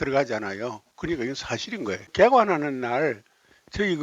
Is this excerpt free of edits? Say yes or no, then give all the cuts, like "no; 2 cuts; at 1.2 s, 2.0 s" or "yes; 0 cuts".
no; 1 cut; at 2.1 s